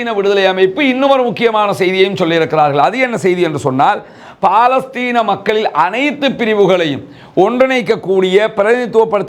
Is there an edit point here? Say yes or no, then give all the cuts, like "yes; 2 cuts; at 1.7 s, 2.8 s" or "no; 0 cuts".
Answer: no; 0 cuts